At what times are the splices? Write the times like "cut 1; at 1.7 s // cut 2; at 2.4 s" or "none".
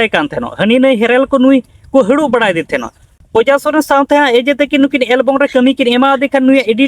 cut 1; at 3.1 s